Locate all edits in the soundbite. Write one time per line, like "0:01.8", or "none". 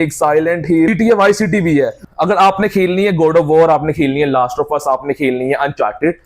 0:00.9
0:02.0